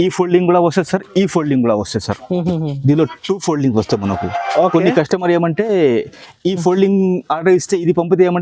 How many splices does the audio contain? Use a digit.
0